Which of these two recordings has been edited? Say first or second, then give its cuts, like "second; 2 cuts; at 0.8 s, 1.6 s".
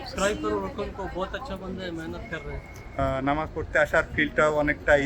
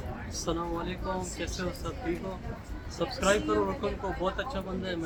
first; 1 cut; at 3.0 s